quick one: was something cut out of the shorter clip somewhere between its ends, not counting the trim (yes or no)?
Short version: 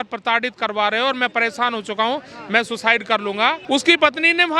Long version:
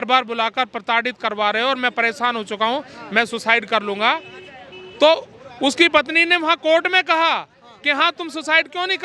yes